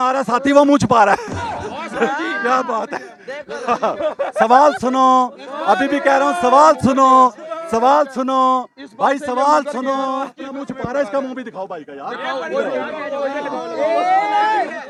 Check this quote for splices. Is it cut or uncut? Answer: uncut